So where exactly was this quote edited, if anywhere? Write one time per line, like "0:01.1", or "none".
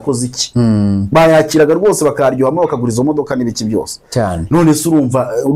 none